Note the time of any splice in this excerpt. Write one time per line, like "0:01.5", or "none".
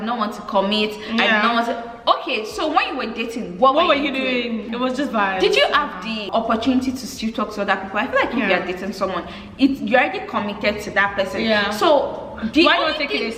none